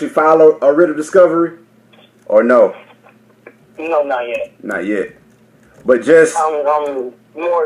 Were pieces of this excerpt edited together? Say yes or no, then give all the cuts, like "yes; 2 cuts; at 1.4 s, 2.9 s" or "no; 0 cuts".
yes; 1 cut; at 2.4 s